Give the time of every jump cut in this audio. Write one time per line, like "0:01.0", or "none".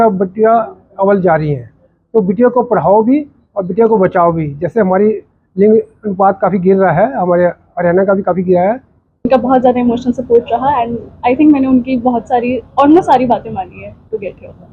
0:09.2

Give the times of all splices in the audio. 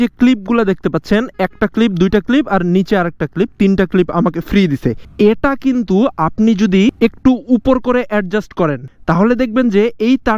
0:05.0
0:06.9
0:08.8

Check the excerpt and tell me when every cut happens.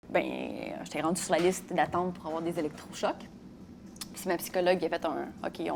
none

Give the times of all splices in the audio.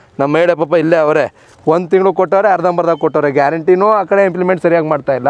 none

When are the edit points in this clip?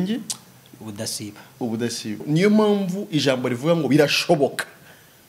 0:02.2

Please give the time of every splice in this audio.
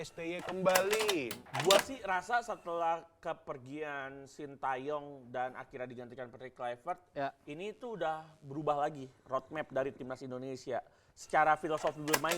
0:01.4

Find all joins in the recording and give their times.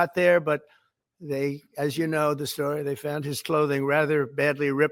none

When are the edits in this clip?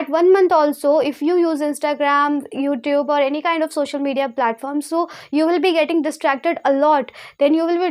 none

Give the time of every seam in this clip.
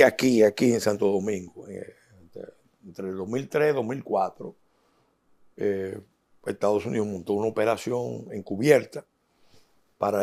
none

